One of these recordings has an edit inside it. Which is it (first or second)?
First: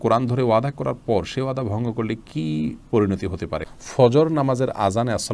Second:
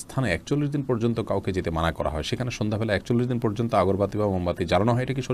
first